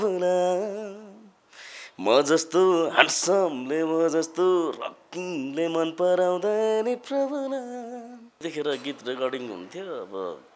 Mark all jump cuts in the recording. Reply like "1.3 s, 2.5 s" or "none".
8.4 s